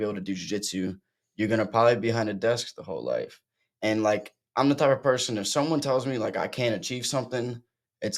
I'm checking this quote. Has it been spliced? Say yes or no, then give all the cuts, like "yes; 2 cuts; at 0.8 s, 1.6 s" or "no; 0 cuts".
no; 0 cuts